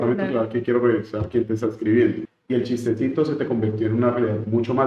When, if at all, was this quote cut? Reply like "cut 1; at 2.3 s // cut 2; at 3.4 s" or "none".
cut 1; at 2.3 s